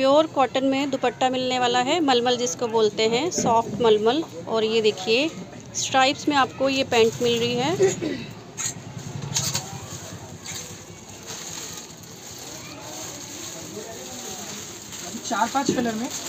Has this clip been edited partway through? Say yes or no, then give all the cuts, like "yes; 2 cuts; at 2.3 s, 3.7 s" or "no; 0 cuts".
no; 0 cuts